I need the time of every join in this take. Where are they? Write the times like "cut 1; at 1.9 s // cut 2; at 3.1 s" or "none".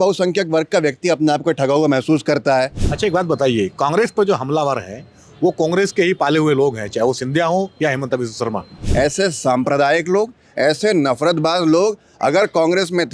cut 1; at 2.8 s // cut 2; at 8.8 s